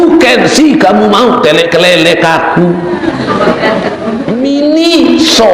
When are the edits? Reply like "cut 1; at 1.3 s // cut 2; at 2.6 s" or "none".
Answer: cut 1; at 4.2 s